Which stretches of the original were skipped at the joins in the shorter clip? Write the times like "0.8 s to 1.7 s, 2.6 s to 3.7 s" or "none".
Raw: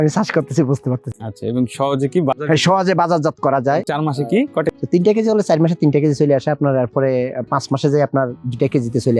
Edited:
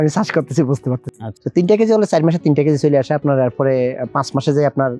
1.4 s to 4.8 s